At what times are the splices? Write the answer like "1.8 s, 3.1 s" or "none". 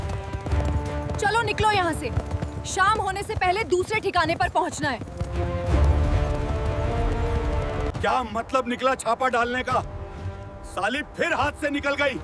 7.9 s